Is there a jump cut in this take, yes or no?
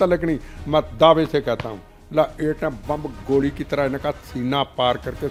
no